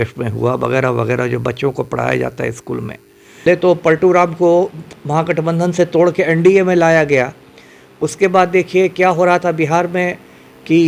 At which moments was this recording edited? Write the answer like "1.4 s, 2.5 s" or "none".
3.5 s